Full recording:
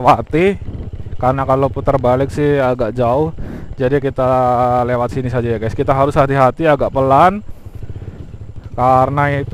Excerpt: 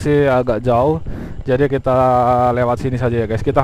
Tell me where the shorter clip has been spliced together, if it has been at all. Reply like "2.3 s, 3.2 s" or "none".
none